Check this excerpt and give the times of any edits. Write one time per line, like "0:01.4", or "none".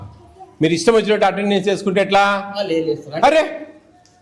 none

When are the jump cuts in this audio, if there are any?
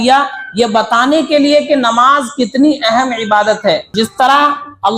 0:03.9

